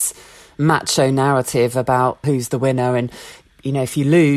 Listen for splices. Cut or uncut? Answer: cut